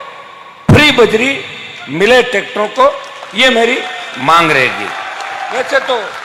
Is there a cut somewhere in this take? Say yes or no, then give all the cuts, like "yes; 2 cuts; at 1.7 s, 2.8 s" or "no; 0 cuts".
no; 0 cuts